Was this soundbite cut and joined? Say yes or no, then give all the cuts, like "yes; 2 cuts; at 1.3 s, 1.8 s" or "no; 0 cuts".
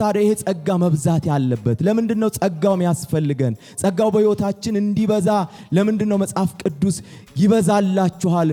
no; 0 cuts